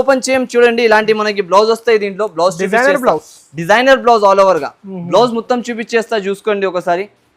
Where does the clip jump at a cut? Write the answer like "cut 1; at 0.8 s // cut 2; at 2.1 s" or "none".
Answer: none